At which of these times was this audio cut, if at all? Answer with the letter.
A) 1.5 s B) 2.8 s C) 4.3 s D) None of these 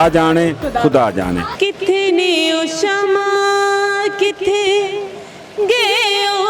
A